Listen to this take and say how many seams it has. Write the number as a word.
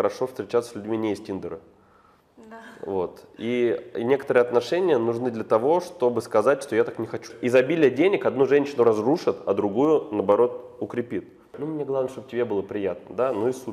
two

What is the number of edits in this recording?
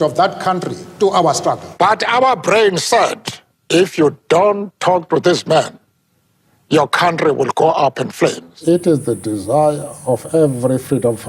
two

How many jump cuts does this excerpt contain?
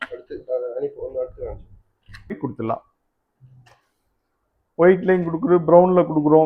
one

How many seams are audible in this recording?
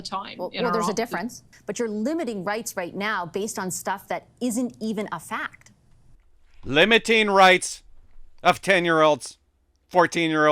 one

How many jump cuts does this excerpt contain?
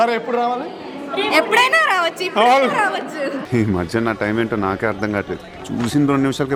zero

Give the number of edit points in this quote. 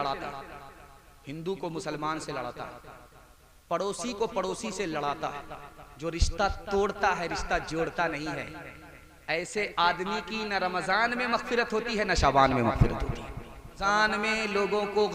one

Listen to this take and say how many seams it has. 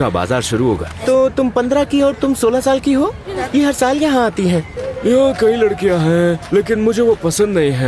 three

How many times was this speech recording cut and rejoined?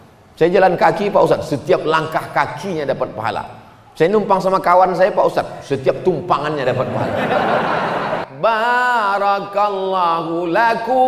one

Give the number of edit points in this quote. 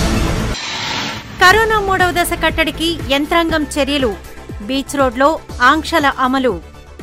one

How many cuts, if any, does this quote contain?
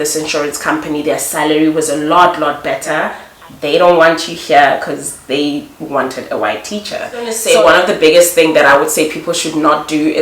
two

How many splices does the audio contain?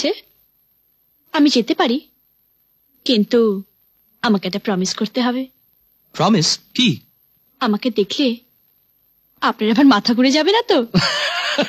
zero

